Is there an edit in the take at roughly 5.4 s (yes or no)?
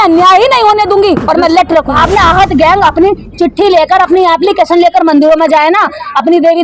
no